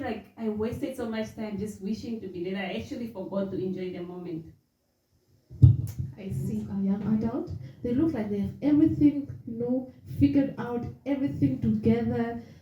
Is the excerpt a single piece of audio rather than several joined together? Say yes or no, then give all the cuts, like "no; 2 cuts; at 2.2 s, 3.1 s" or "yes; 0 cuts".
no; 1 cut; at 6.7 s